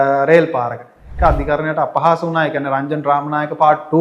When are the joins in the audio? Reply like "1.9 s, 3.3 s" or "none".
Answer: 1.1 s